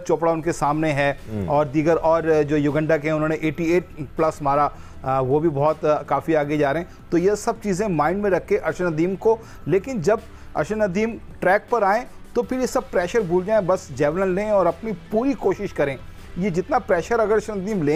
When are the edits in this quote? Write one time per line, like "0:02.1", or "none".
none

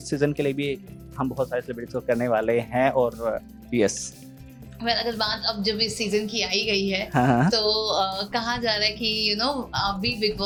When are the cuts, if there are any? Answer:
none

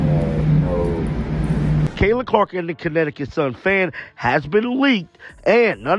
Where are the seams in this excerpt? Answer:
0:01.9

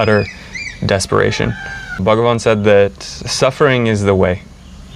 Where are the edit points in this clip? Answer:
0:02.0

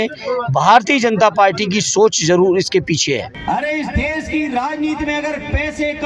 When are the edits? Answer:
0:03.3

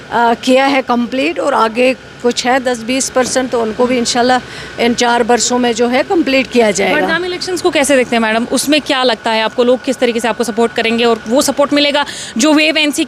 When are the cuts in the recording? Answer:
none

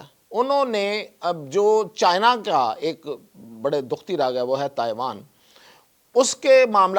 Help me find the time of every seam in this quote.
none

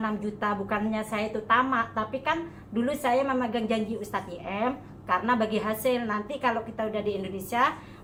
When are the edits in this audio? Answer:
none

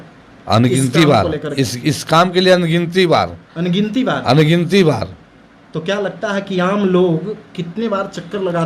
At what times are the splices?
none

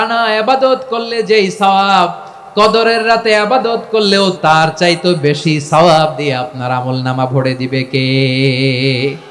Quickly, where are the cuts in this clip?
0:04.3

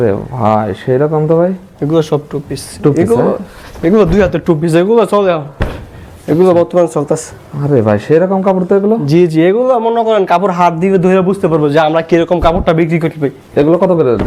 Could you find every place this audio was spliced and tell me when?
none

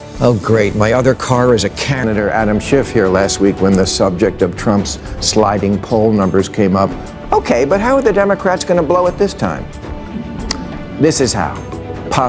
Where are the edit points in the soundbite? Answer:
0:01.8

